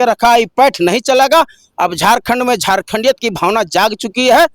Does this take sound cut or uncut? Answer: uncut